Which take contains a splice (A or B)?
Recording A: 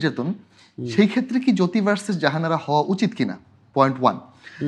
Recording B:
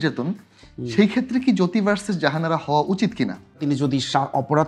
B